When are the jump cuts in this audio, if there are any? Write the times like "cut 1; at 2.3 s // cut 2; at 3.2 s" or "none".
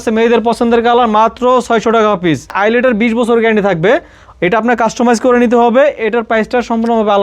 cut 1; at 2.5 s